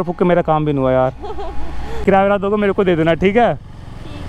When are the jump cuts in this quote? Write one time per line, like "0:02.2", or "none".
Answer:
0:02.0